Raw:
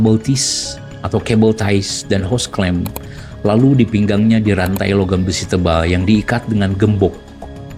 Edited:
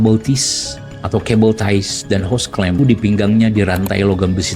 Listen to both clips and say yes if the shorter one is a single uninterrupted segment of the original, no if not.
no